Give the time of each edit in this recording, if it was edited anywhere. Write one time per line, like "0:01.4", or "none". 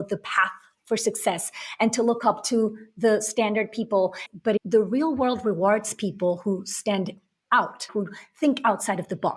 0:04.3
0:07.9

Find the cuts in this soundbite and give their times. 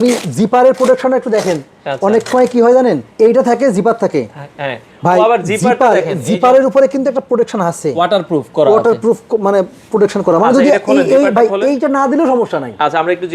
none

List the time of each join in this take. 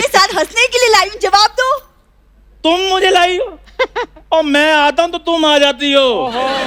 none

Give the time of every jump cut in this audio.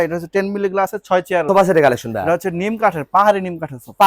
0:01.4

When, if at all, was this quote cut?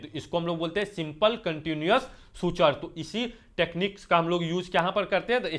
none

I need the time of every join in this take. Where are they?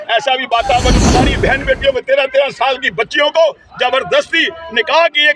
0:01.0

